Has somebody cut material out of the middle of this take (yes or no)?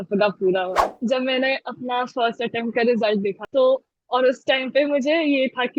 yes